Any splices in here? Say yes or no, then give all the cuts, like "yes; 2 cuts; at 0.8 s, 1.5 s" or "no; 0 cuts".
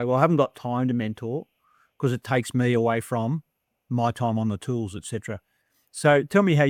no; 0 cuts